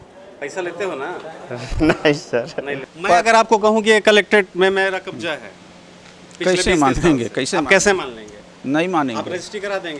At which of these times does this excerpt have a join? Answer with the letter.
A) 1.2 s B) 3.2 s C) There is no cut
B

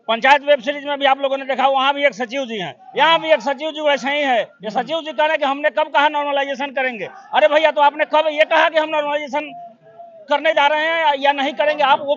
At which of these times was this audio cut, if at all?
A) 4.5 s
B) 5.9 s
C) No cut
C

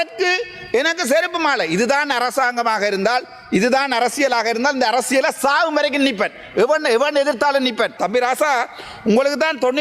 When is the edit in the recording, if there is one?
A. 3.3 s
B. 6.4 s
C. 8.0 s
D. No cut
C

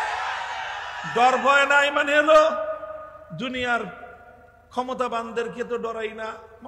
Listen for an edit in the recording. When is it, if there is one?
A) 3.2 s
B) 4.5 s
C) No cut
C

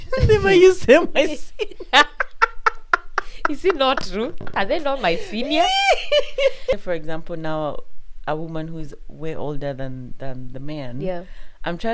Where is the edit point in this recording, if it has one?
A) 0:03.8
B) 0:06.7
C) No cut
B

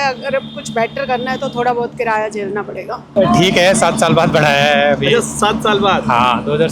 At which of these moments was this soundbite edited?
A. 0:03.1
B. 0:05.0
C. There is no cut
A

